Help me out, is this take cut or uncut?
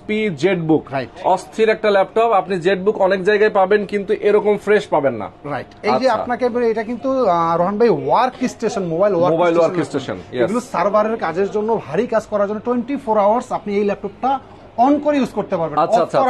uncut